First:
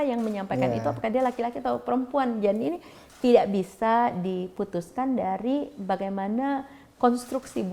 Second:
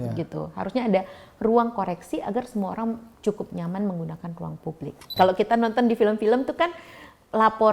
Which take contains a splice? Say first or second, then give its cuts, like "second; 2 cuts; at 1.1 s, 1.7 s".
second; 1 cut; at 5.1 s